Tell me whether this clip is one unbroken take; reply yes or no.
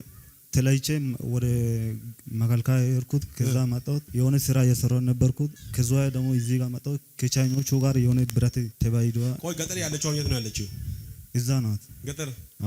no